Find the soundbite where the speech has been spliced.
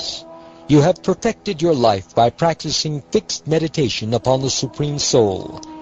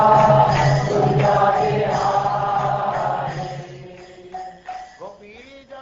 first; 1 cut; at 1.0 s

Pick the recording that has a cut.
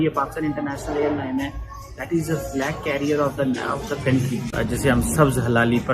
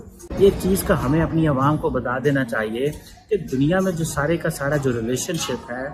first; 2 cuts; at 1.6 s, 4.5 s

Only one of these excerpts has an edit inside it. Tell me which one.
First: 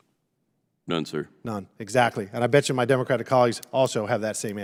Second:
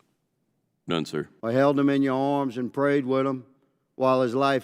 second; 1 cut; at 1.3 s

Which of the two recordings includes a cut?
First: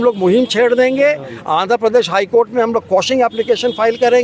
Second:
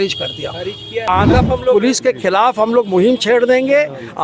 second; 1 cut; at 1.0 s

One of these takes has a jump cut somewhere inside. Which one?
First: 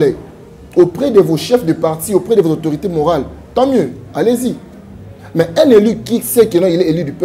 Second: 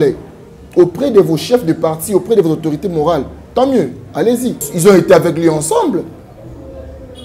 second; 1 cut; at 4.7 s

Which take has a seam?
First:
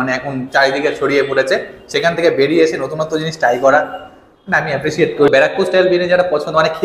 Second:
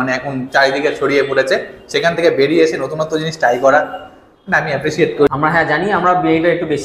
second; 1 cut; at 5.3 s

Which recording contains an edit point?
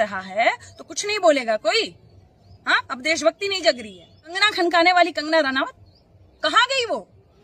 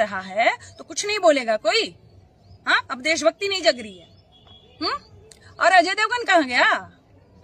first; 1 cut; at 4.4 s

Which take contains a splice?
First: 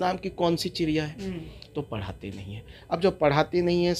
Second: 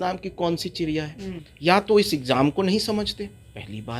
second; 1 cut; at 1.5 s

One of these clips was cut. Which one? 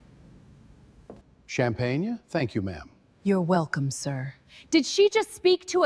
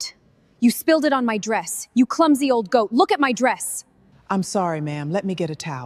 first; 1 cut; at 1.3 s

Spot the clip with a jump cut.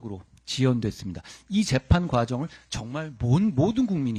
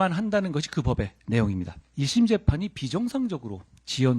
second; 2 cuts; at 1.2 s, 1.8 s

